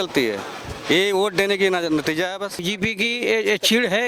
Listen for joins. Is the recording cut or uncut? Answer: cut